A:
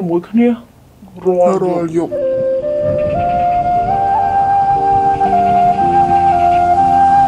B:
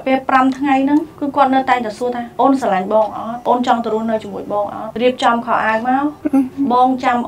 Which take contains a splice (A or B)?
B